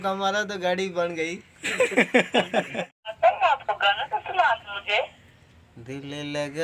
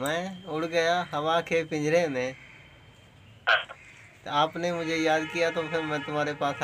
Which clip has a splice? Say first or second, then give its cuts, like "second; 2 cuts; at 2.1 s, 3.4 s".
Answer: first; 1 cut; at 3.0 s